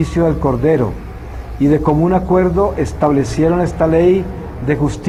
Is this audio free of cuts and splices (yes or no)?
yes